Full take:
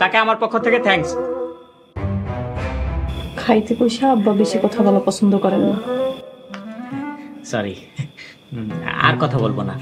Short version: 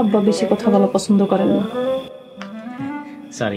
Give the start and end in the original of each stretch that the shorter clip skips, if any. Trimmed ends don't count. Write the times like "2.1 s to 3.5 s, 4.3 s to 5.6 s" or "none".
none